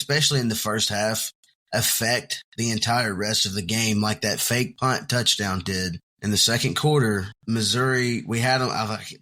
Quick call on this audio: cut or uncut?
cut